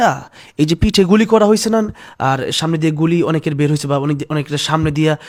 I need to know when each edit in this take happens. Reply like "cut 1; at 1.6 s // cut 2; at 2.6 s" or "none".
none